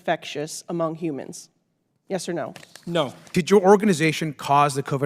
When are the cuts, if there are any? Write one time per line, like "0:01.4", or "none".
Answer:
0:03.2